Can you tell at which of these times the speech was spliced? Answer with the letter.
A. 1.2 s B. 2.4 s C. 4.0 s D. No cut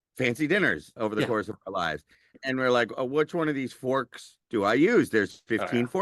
B